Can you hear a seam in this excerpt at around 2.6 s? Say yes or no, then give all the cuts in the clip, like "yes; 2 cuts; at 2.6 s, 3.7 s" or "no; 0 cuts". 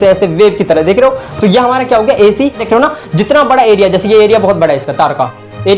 yes; 1 cut; at 2.6 s